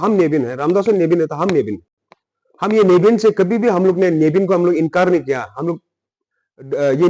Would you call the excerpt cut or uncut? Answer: uncut